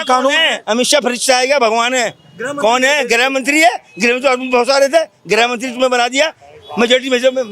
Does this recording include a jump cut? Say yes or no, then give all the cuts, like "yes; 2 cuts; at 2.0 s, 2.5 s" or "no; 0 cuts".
no; 0 cuts